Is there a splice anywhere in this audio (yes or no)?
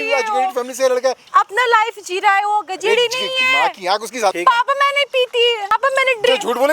yes